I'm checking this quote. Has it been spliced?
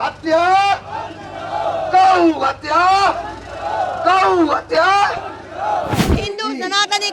yes; 1 cut; at 6.0 s

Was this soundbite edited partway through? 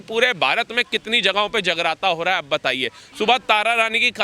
no; 0 cuts

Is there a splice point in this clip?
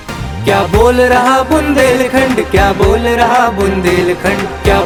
no; 0 cuts

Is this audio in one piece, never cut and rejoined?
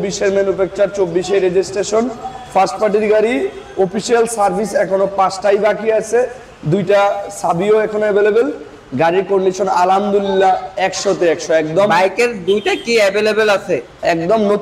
yes; 0 cuts

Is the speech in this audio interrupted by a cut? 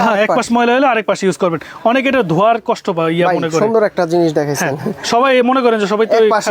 no; 0 cuts

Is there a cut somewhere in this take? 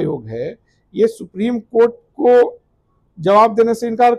no; 0 cuts

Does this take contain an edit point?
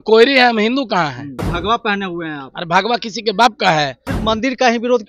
yes; 2 cuts; at 1.5 s, 4.0 s

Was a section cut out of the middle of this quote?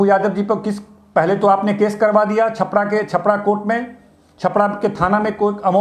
no; 0 cuts

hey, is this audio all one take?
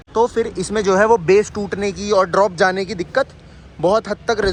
yes; 0 cuts

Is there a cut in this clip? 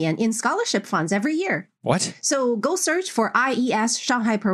no; 0 cuts

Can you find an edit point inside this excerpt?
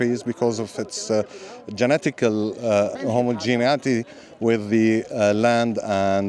yes; 1 cut; at 2.9 s

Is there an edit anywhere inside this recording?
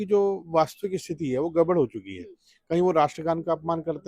no; 0 cuts

